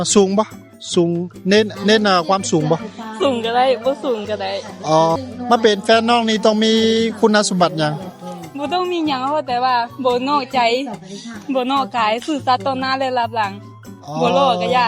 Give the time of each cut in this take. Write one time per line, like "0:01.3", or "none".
0:05.2